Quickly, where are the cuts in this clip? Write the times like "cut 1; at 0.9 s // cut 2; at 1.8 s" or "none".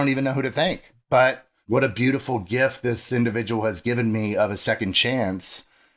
cut 1; at 0.9 s // cut 2; at 1.5 s